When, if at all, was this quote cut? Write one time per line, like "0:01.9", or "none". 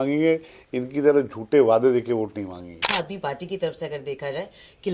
0:02.9